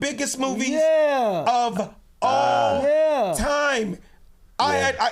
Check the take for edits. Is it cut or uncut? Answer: uncut